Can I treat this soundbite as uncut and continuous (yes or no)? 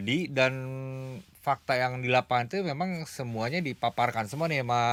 yes